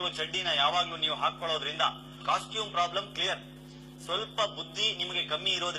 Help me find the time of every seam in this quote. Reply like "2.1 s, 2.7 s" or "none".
4.1 s